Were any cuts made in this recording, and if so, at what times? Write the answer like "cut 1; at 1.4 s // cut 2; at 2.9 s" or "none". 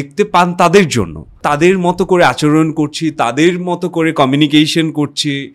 cut 1; at 1.3 s